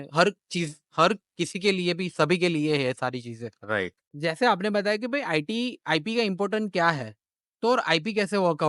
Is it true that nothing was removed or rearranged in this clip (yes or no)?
no